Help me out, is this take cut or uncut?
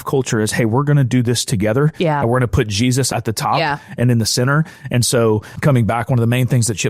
cut